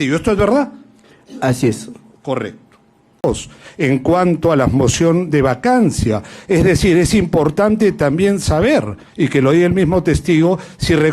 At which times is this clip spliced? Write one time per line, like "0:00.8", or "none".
0:03.2